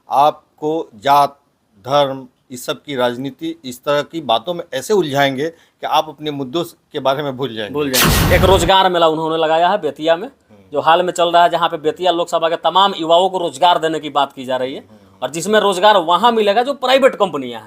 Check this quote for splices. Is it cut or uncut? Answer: cut